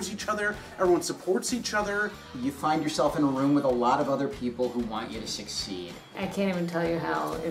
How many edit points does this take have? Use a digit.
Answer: 2